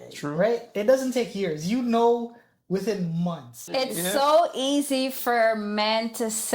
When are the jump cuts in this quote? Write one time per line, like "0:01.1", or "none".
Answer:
0:03.6